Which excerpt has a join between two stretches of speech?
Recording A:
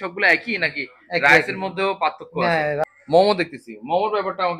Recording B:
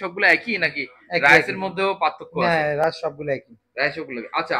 A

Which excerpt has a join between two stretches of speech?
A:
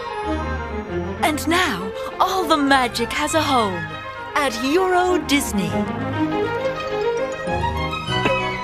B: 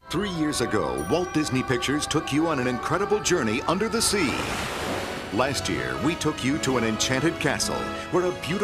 A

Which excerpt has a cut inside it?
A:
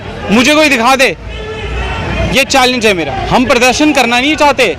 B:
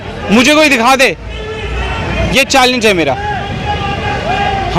A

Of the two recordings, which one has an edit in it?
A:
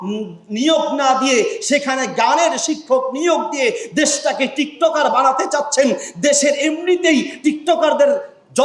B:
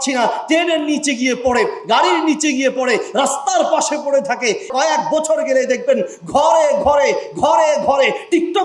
B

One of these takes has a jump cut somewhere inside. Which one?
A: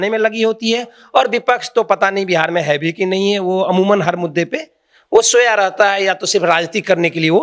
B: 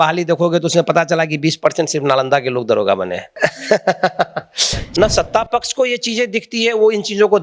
B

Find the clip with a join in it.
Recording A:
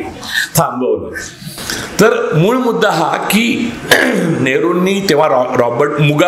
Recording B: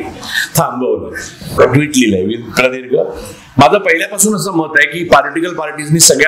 B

